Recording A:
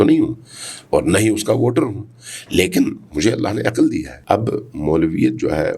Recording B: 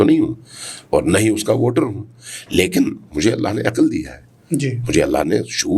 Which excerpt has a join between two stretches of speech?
A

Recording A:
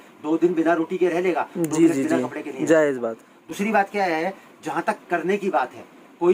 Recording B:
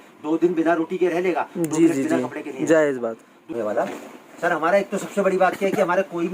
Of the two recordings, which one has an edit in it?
B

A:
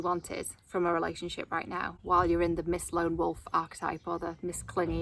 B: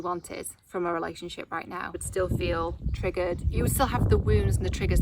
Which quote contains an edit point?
B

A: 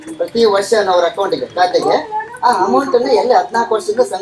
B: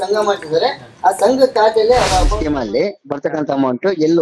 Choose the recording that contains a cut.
B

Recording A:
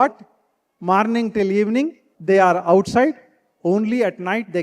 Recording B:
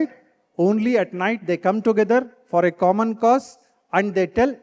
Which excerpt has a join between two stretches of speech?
A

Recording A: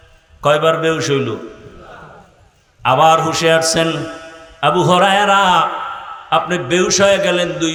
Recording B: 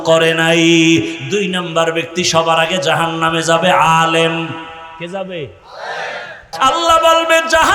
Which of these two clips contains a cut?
B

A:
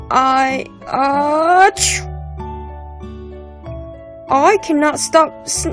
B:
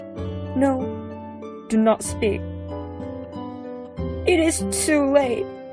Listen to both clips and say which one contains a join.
A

